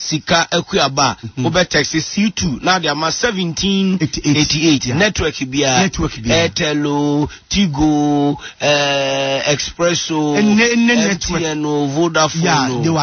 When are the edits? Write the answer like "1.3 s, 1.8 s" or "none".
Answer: 8.5 s